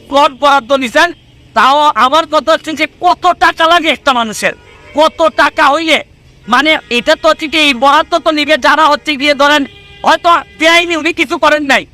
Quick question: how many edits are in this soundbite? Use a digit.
0